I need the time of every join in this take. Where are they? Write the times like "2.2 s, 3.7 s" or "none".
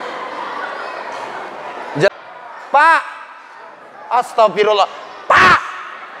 2.1 s